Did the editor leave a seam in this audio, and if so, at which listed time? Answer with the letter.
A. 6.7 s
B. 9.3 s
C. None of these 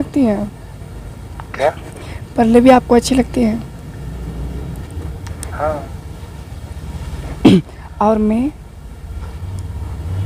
C